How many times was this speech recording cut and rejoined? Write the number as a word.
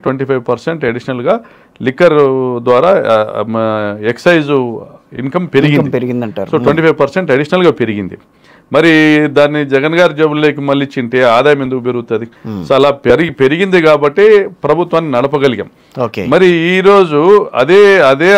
zero